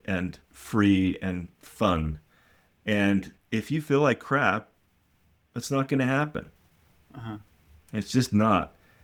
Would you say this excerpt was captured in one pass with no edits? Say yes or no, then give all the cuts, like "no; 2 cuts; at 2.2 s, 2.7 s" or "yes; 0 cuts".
yes; 0 cuts